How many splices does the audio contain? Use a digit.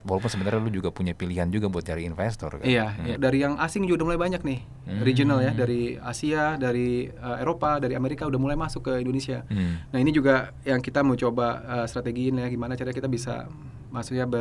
1